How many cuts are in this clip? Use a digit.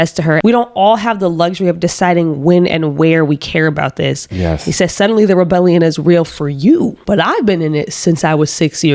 0